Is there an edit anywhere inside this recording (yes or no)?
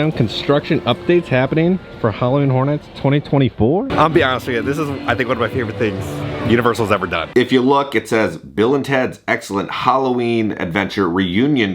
yes